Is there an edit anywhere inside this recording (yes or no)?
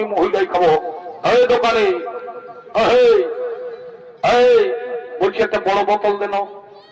no